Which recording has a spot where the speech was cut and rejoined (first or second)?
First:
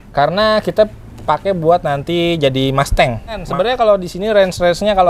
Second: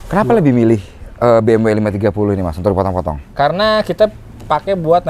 first